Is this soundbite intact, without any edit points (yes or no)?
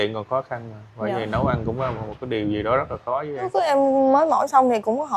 no